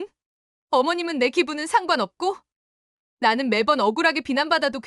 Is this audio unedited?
yes; 0 cuts

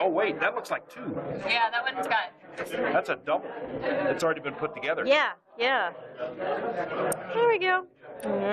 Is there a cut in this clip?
no; 0 cuts

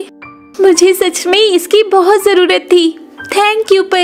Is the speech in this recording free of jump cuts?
yes; 0 cuts

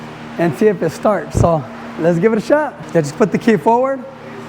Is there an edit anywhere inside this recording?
yes; 1 cut; at 2.8 s

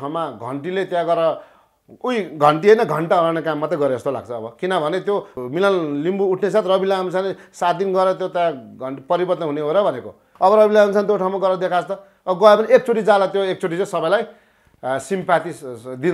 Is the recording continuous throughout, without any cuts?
no; 1 cut; at 5.3 s

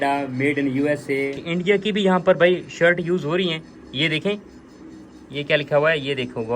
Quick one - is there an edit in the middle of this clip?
yes; 1 cut; at 1.4 s

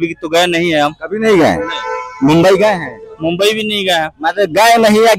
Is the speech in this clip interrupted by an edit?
no; 0 cuts

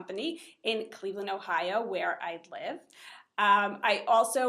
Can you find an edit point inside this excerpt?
yes; 1 cut; at 1.4 s

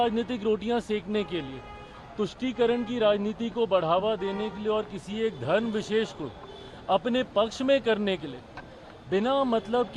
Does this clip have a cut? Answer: no; 0 cuts

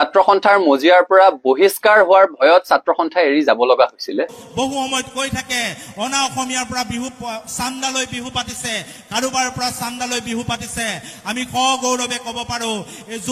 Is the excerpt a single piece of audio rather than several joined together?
no; 1 cut; at 4.4 s

